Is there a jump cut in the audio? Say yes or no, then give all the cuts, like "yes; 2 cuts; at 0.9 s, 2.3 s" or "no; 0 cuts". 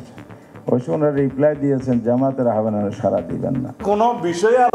yes; 1 cut; at 3.8 s